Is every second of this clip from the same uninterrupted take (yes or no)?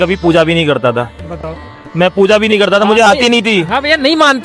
yes